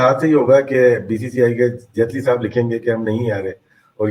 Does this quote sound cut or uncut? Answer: uncut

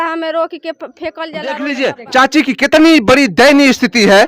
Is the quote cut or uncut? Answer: cut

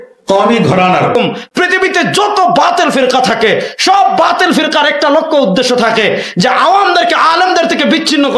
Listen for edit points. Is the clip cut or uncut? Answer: cut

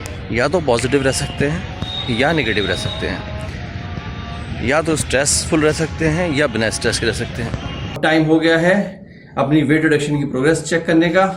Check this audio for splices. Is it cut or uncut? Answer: cut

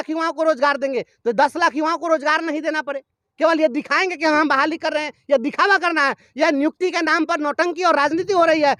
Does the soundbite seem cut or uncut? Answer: uncut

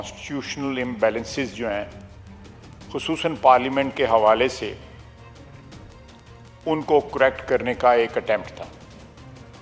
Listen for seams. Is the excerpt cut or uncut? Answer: cut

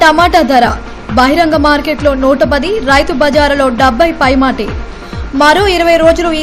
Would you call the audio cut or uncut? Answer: uncut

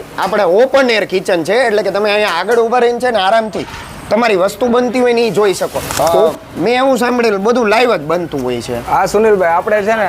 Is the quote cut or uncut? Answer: cut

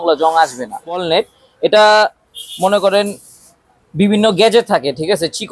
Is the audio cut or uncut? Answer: cut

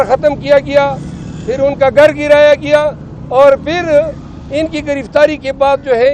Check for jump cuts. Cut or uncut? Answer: uncut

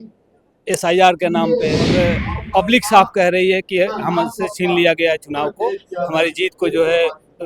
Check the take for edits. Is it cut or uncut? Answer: cut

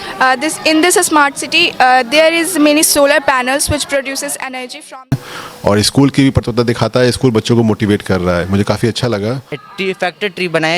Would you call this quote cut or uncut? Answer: cut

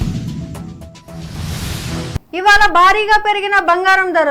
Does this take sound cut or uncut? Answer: cut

